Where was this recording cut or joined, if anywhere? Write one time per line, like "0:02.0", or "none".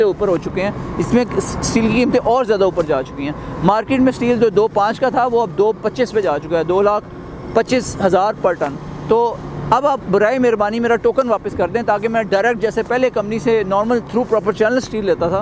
none